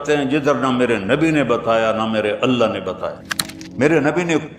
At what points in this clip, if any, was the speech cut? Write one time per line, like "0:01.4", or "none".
0:03.3

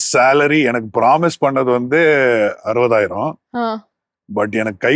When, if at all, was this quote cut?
none

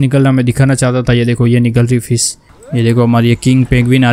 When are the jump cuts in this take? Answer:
0:02.5

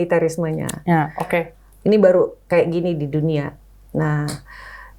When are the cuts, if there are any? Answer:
none

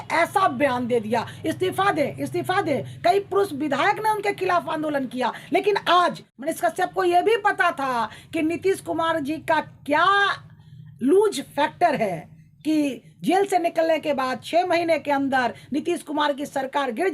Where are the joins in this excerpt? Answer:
0:06.3

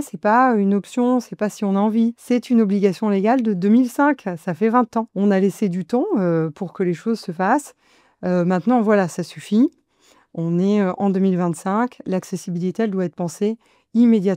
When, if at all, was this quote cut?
0:02.2
0:05.1

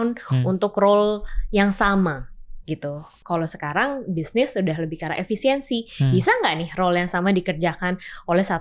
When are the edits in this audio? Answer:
0:03.1

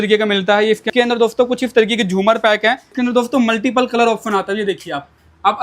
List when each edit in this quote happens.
0:00.9
0:02.9

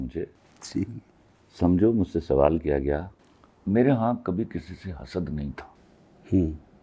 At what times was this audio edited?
0:03.1

